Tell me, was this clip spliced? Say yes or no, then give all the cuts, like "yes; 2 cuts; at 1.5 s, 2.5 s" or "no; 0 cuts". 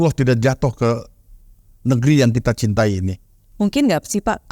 yes; 1 cut; at 3.4 s